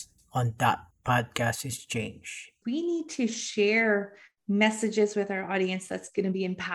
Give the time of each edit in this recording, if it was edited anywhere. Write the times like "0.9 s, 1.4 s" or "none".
2.6 s

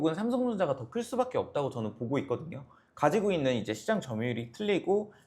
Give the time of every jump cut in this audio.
none

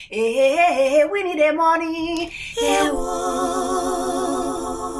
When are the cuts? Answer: none

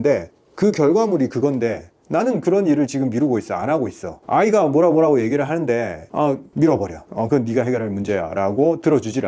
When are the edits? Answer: none

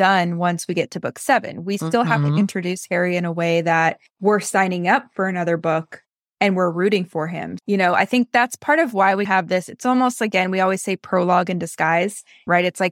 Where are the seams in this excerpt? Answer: 4.1 s

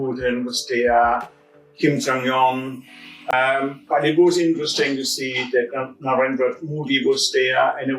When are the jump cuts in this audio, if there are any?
3.3 s

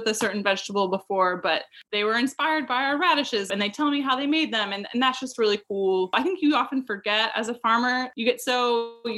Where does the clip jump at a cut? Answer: 1.8 s, 3.5 s, 6.1 s, 8.1 s

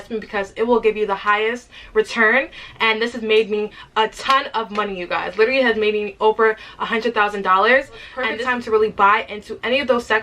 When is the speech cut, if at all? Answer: 8.0 s

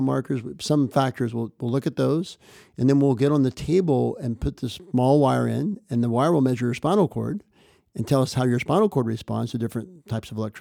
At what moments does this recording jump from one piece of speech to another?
none

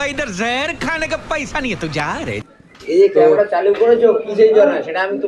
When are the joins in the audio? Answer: 2.5 s

